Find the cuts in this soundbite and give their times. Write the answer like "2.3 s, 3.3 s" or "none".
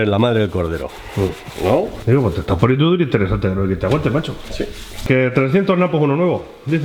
2.0 s, 5.0 s